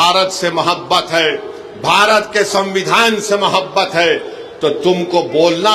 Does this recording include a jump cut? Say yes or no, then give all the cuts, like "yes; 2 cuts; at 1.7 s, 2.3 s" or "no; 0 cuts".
no; 0 cuts